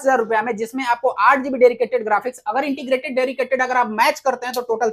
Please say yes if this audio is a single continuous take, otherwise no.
yes